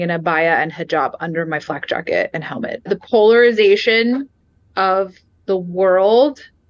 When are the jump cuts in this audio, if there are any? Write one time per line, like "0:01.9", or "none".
0:02.9